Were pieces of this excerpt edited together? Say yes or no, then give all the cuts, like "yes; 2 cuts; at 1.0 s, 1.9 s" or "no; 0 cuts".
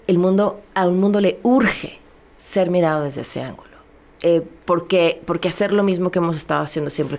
no; 0 cuts